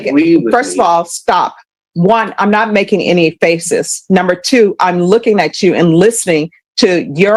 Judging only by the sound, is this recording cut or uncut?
uncut